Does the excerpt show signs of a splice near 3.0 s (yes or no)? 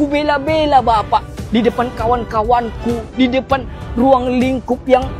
yes